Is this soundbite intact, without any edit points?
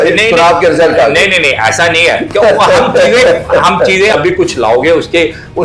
no; 1 cut; at 4.1 s

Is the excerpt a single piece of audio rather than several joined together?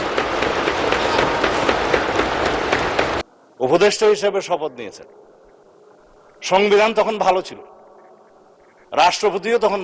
no; 1 cut; at 3.2 s

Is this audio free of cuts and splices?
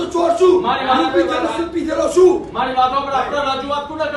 yes; 0 cuts

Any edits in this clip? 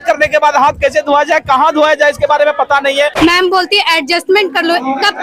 yes; 1 cut; at 3.1 s

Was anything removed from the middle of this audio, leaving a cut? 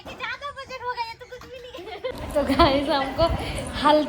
yes; 1 cut; at 2.1 s

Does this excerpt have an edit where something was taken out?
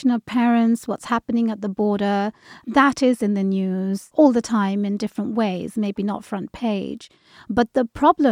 yes; 2 cuts; at 2.6 s, 4.0 s

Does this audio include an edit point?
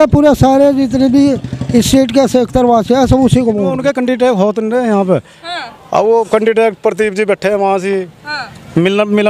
yes; 1 cut; at 3.8 s

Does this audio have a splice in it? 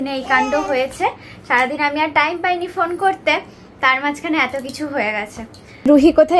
no; 0 cuts

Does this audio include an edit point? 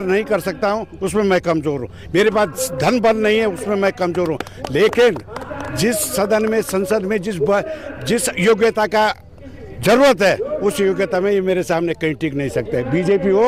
no; 0 cuts

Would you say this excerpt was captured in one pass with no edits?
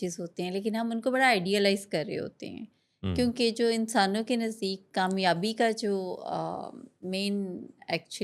yes; 0 cuts

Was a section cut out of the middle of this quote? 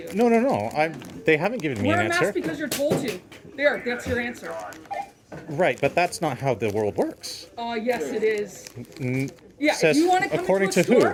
no; 0 cuts

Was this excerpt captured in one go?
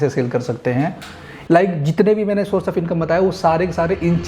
no; 1 cut; at 1.3 s

